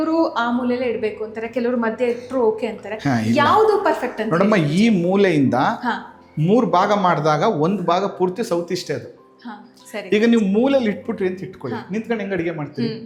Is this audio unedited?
yes; 0 cuts

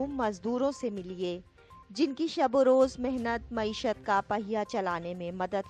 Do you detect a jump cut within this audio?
no; 0 cuts

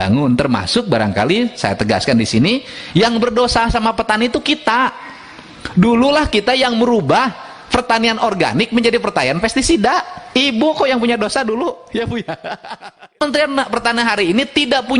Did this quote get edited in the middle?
yes; 1 cut; at 13.2 s

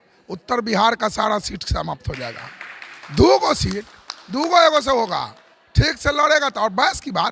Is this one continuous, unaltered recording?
yes; 0 cuts

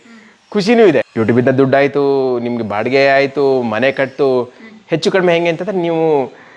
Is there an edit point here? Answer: yes; 1 cut; at 1.1 s

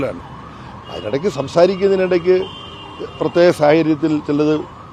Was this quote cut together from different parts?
no; 0 cuts

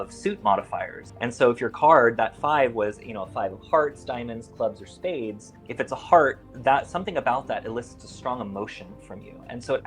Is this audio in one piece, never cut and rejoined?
yes; 0 cuts

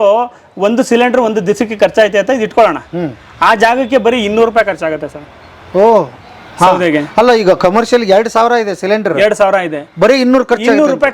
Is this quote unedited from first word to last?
yes; 0 cuts

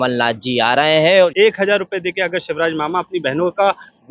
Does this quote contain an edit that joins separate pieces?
yes; 1 cut; at 1.3 s

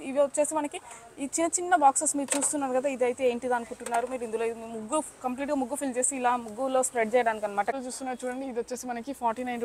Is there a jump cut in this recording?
yes; 1 cut; at 7.7 s

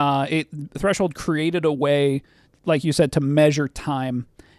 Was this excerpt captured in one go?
yes; 0 cuts

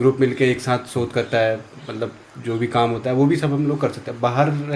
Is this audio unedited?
yes; 0 cuts

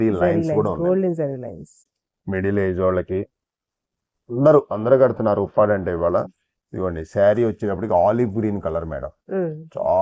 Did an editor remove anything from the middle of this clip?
yes; 1 cut; at 1.9 s

